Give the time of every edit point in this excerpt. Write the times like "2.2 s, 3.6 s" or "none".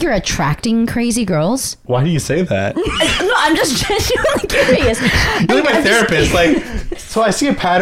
1.7 s